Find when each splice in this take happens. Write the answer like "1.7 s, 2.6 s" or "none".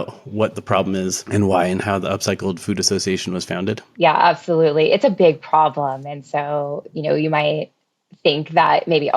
1.2 s, 3.8 s